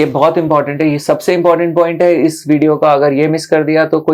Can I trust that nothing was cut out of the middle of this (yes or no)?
yes